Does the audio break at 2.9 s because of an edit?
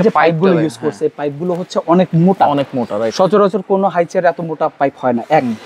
no; 0 cuts

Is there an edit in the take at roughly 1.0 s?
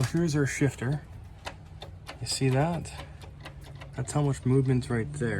yes; 1 cut; at 1.0 s

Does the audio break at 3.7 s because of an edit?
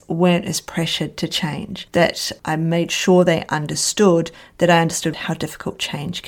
no; 1 cut; at 5.1 s

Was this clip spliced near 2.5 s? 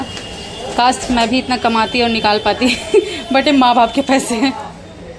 no; 0 cuts

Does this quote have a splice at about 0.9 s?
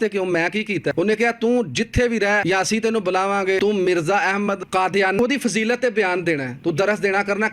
yes; 4 cuts; at 0.9 s, 2.4 s, 3.6 s, 5.2 s

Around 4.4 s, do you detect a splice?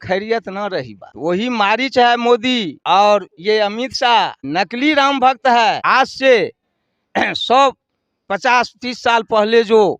yes; 4 cuts; at 1.0 s, 2.7 s, 4.4 s, 5.8 s

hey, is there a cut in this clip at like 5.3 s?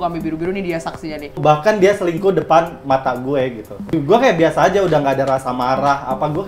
no; 2 cuts; at 1.4 s, 3.9 s

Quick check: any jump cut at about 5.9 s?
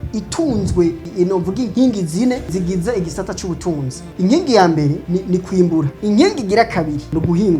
yes; 3 cuts; at 2.5 s, 4.1 s, 5.9 s

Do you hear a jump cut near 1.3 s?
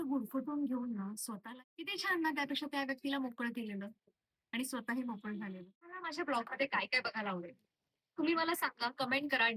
yes; 2 cuts; at 1.3 s, 6.1 s

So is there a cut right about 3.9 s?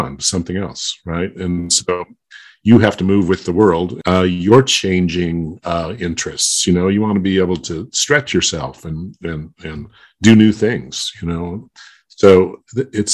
yes; 1 cut; at 3.9 s

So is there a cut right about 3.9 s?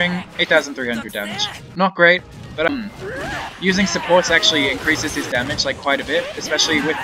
no; 1 cut; at 2.7 s

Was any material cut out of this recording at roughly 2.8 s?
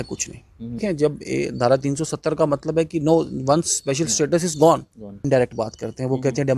no; 2 cuts; at 0.8 s, 5.2 s

